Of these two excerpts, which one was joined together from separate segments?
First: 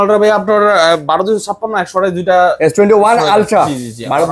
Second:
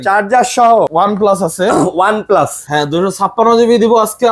second; 2 cuts; at 0.9 s, 2.6 s

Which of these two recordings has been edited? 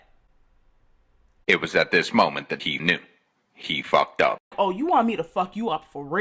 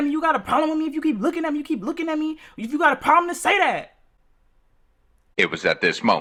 first; 1 cut; at 4.5 s

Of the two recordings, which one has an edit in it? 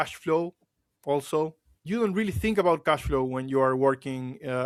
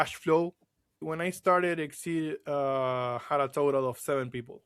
second; 1 cut; at 1.0 s

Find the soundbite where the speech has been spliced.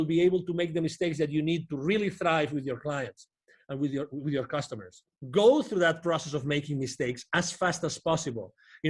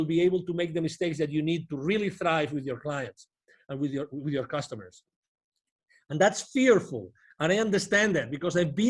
first; 1 cut; at 5.1 s

